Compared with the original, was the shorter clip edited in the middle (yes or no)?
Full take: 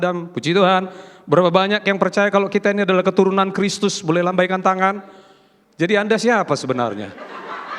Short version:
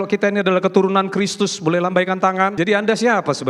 yes